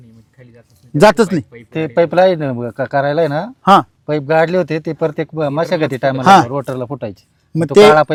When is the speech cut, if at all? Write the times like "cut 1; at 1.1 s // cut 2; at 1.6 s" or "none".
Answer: none